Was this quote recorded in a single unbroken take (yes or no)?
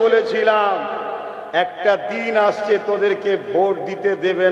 yes